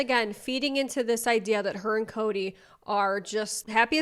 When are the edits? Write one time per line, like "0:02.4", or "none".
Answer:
none